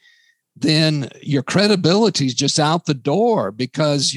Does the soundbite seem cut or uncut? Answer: uncut